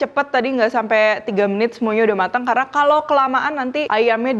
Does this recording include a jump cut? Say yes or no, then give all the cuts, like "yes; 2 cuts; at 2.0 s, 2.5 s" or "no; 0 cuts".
no; 0 cuts